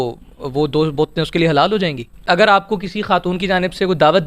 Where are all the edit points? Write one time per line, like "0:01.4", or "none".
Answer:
0:02.3